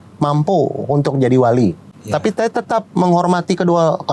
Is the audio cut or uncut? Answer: cut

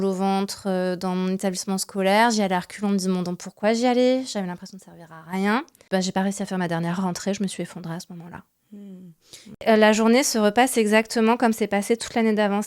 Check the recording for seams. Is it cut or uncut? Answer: cut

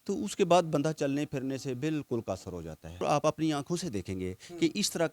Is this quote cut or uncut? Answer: cut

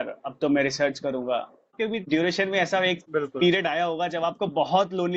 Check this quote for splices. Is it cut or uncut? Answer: cut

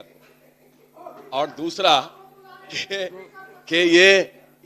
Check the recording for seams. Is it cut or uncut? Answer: uncut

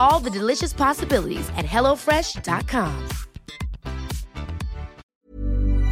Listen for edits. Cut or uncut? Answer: cut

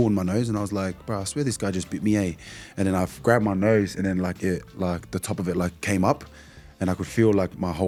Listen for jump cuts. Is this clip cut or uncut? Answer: uncut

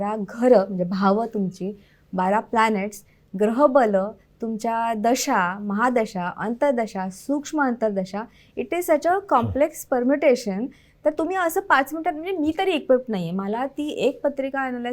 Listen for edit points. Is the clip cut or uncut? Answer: uncut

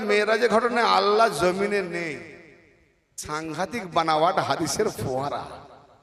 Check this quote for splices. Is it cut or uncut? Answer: cut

